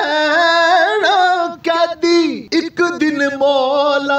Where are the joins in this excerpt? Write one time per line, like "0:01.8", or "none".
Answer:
0:02.4